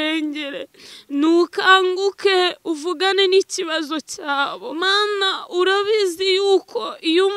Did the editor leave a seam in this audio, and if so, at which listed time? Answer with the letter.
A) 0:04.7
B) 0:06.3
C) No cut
A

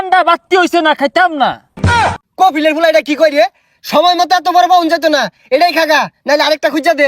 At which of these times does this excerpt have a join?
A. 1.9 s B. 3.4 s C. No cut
A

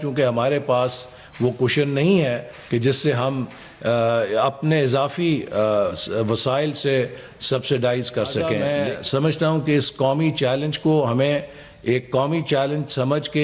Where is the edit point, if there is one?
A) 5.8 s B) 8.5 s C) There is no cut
B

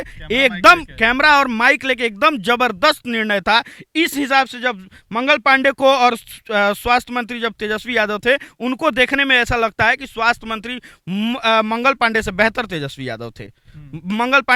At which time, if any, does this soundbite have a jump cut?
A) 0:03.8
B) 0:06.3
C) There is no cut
C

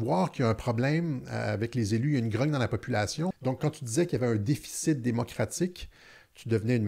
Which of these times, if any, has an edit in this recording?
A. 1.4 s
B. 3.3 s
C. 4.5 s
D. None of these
B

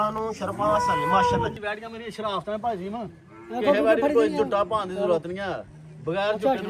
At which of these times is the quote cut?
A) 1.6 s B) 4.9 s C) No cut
A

